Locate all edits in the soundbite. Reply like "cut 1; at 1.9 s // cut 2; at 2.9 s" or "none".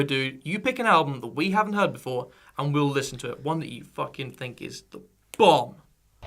cut 1; at 1.2 s